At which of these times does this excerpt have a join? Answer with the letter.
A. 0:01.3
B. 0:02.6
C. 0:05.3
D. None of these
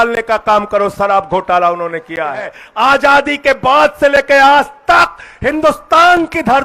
B